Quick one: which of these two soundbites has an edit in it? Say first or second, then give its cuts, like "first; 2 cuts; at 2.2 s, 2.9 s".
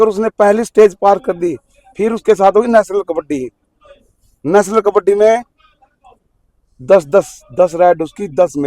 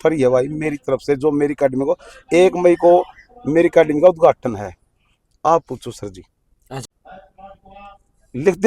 second; 1 cut; at 6.8 s